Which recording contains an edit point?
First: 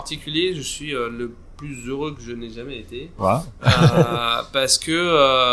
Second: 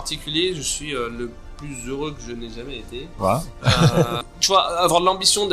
second; 1 cut; at 4.3 s

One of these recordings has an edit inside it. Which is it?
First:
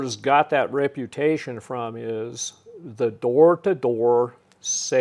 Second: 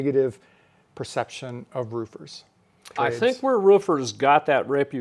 second; 1 cut; at 2.9 s

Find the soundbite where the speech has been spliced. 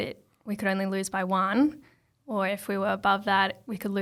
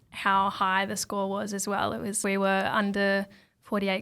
second; 1 cut; at 2.2 s

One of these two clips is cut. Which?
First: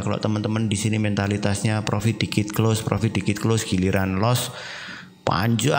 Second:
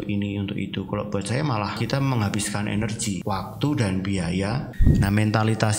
second; 3 cuts; at 1.7 s, 3.2 s, 4.8 s

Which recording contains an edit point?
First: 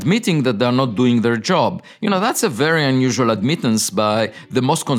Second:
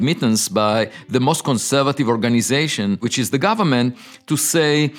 second; 1 cut; at 3.1 s

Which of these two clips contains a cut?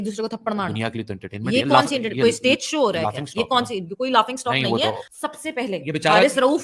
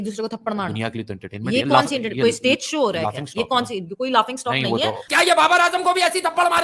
second; 1 cut; at 5.0 s

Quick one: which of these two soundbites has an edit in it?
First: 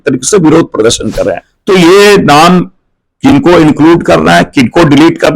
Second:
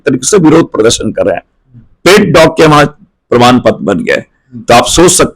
first; 1 cut; at 1.5 s

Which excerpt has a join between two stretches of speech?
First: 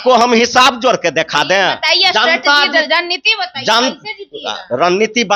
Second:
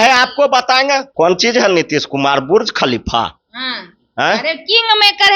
second; 1 cut; at 1.1 s

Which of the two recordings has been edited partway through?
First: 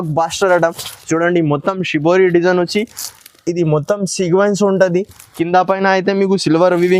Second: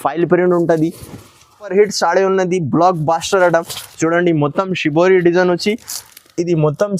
second; 1 cut; at 1.6 s

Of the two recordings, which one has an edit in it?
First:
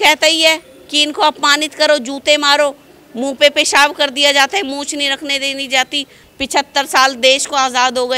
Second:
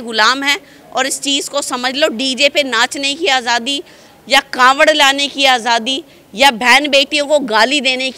first; 1 cut; at 6.2 s

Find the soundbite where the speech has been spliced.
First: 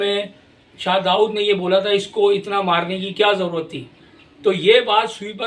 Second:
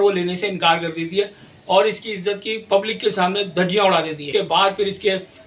second; 1 cut; at 4.2 s

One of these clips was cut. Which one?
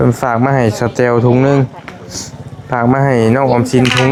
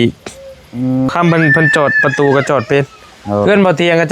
second; 1 cut; at 1.1 s

